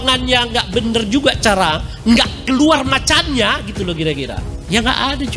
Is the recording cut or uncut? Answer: uncut